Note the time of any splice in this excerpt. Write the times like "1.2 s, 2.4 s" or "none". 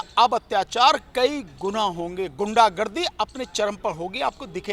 none